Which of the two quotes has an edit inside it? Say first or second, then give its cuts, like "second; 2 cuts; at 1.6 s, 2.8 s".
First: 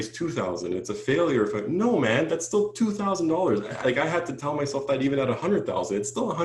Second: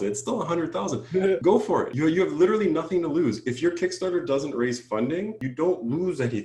second; 2 cuts; at 1.6 s, 5.4 s